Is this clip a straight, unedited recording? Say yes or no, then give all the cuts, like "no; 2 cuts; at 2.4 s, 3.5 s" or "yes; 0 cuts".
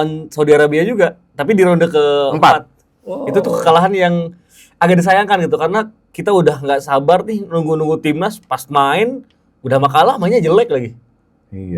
yes; 0 cuts